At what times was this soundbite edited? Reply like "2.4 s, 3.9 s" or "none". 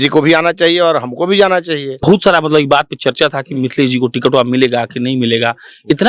2.0 s